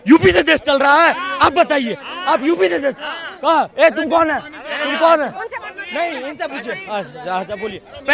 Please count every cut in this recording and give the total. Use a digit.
0